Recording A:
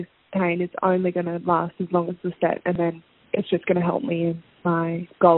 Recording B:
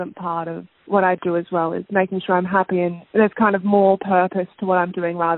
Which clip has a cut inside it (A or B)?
B